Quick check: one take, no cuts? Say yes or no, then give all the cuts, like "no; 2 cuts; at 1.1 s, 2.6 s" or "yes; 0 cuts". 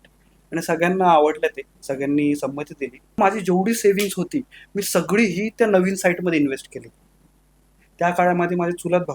no; 1 cut; at 3.2 s